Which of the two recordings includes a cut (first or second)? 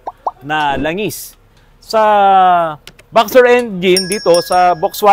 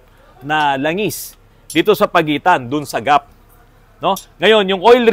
first